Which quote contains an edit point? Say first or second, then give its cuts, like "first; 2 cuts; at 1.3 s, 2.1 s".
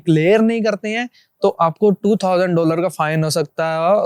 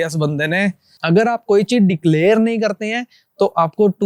second; 1 cut; at 1.0 s